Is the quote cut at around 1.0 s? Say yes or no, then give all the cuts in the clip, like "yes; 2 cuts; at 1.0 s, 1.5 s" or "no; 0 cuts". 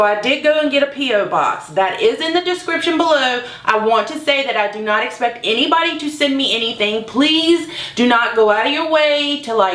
no; 0 cuts